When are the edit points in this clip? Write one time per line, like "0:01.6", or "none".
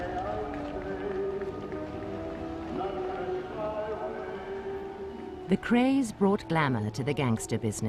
none